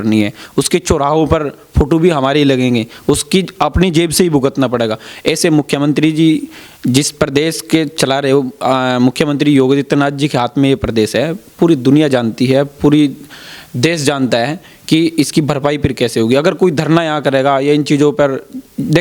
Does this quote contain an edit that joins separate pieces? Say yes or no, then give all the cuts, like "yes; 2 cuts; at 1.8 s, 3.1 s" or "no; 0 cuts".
no; 0 cuts